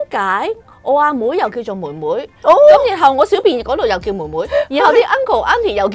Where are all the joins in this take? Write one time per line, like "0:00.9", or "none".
none